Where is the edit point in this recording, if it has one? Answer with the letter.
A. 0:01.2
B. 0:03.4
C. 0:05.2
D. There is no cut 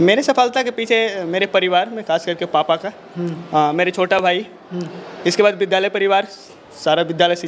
D